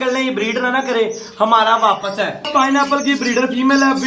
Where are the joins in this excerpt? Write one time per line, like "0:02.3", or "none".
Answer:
0:02.4